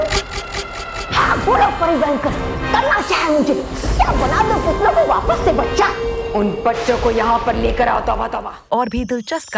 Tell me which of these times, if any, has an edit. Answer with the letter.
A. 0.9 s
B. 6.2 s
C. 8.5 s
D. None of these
C